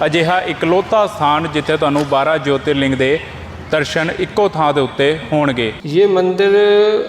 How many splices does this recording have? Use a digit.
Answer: 1